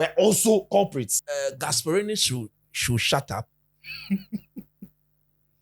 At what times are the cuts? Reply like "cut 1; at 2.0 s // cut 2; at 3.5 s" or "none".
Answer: cut 1; at 1.2 s